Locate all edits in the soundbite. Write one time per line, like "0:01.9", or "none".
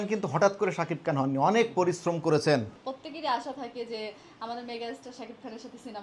0:02.8

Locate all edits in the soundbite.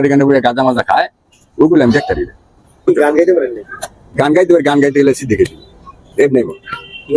none

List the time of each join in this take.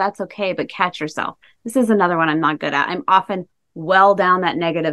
none

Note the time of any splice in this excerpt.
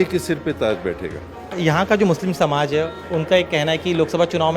0:01.6

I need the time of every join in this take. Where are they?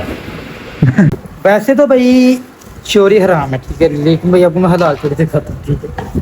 0:01.1

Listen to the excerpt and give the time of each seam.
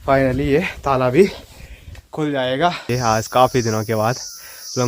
0:02.8

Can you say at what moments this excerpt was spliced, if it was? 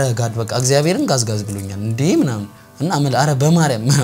none

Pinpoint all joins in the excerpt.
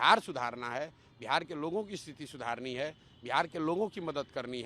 none

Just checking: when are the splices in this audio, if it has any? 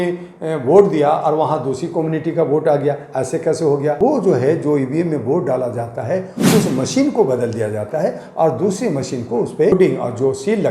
0:04.0
0:09.7

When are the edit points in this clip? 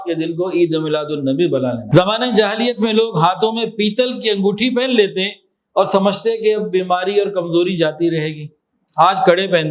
0:01.8

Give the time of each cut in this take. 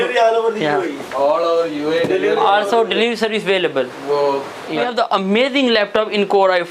0:04.9

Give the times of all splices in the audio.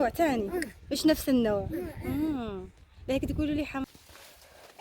0:03.9

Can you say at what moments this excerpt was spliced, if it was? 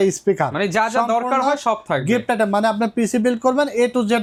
none

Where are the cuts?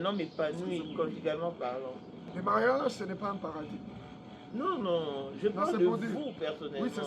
0:02.2

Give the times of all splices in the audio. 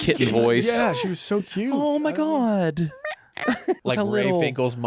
0:03.8

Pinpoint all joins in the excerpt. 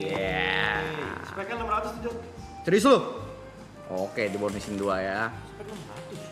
none

